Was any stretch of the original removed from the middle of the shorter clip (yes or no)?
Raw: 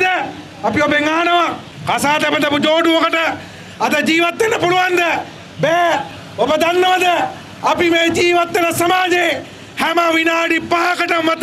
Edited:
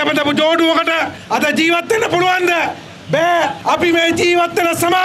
yes